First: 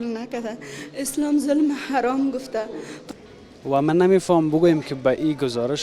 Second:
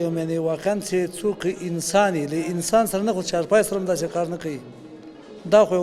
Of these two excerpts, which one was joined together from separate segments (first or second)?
first